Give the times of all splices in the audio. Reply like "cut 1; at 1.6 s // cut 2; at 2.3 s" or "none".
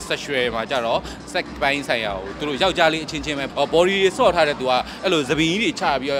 cut 1; at 3.4 s